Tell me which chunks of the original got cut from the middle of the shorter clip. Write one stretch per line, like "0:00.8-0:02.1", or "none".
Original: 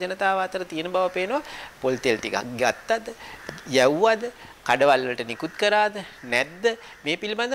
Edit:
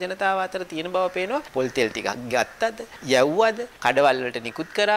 0:01.5-0:01.8
0:03.2-0:03.5
0:04.3-0:04.5